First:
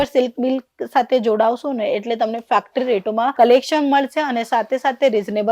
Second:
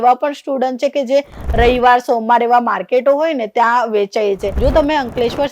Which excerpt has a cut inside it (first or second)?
second